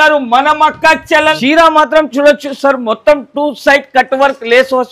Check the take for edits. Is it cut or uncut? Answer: cut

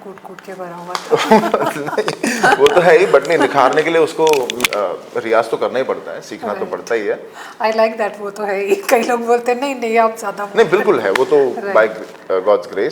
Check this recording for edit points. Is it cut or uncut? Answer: uncut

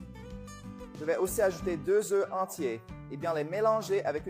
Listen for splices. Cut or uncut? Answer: cut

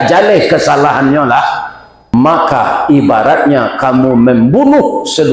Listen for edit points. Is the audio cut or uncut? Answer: cut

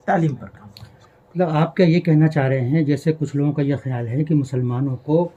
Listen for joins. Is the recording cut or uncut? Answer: uncut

